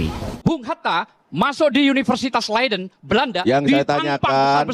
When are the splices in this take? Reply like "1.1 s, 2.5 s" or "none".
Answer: none